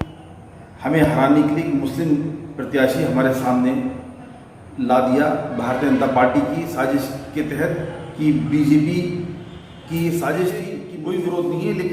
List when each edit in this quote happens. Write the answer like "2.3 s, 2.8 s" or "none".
10.9 s